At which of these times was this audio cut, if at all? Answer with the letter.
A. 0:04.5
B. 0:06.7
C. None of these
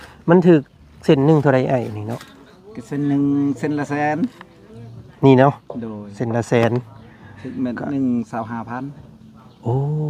C